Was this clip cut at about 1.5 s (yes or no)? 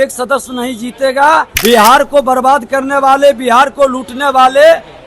yes